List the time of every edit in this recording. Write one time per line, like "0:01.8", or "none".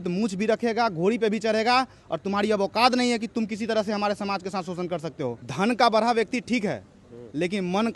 0:05.5